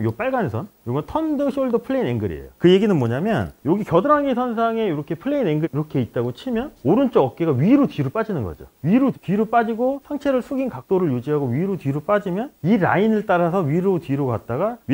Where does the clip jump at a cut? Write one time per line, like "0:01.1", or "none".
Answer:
none

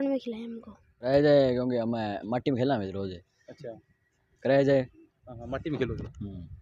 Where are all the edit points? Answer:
0:01.1

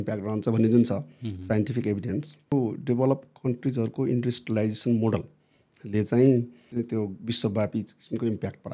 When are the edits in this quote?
0:02.5
0:06.6

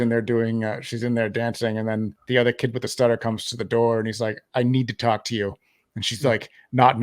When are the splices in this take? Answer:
0:02.2

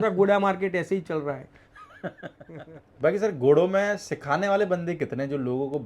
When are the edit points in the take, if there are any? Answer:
0:02.5

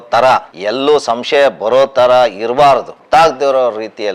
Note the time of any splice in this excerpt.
0:03.0

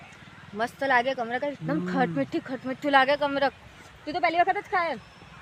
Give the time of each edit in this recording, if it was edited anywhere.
none

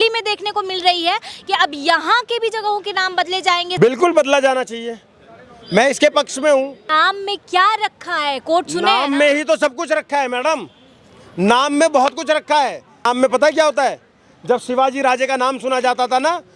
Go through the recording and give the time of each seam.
0:03.7
0:06.8
0:13.0

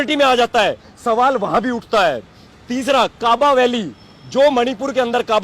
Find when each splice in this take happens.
none

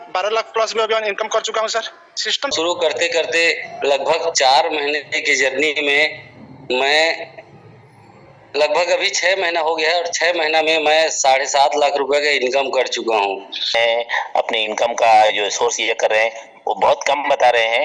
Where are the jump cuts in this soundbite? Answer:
0:02.5
0:13.8

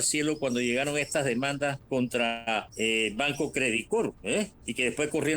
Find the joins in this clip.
0:01.8
0:02.7
0:04.2

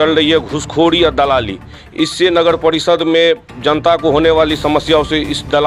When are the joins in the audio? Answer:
none

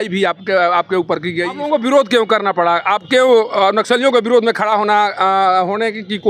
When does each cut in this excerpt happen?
0:01.6

